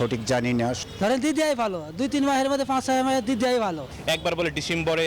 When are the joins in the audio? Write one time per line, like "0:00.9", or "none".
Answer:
0:00.8
0:03.9